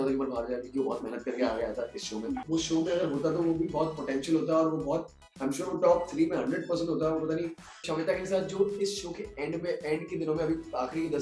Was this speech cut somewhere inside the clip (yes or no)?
yes